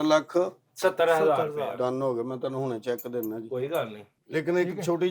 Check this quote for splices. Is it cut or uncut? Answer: cut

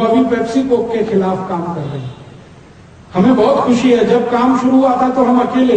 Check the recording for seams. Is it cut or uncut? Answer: uncut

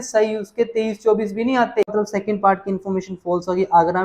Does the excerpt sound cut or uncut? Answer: cut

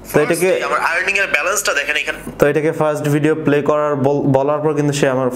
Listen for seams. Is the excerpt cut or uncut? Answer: uncut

